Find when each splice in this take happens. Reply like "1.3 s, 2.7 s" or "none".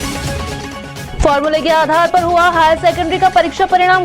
1.0 s